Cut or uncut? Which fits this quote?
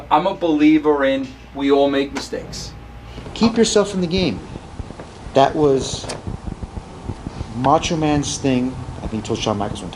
cut